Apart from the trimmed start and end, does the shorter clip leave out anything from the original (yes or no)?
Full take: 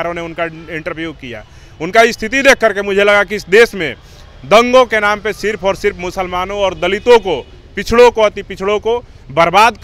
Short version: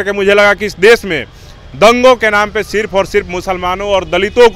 no